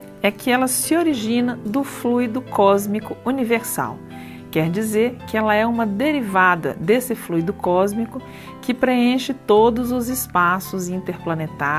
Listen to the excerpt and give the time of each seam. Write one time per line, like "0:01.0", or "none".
0:09.2